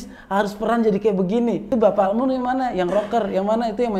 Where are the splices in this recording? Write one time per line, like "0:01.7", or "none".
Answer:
0:01.7